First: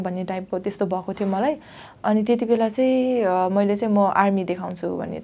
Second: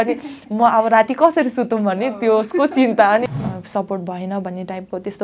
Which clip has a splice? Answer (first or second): second